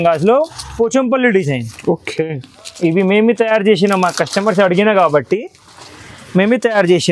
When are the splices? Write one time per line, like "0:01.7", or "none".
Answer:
none